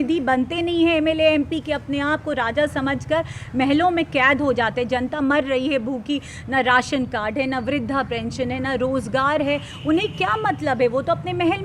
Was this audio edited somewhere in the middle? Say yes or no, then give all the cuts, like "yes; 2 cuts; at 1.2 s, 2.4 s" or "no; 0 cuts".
no; 0 cuts